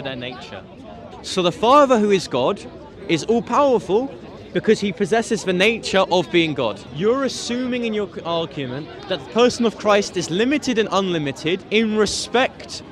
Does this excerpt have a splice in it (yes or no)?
yes